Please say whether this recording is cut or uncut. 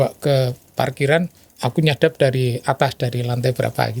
cut